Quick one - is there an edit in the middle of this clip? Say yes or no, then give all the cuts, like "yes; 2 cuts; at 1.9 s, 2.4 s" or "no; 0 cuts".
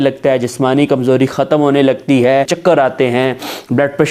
yes; 1 cut; at 2.5 s